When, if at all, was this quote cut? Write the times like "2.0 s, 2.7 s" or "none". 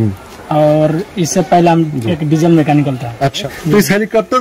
3.5 s